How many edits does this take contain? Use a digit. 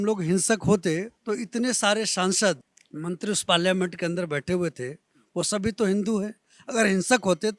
1